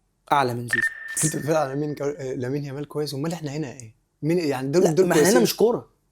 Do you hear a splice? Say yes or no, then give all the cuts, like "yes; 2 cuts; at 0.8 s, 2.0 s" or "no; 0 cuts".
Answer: yes; 1 cut; at 1.2 s